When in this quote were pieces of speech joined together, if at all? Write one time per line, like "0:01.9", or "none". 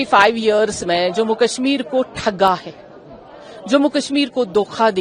none